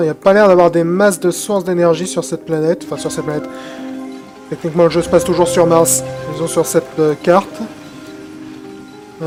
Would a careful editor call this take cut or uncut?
uncut